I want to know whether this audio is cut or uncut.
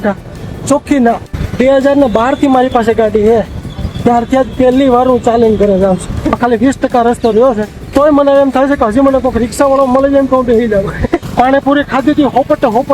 cut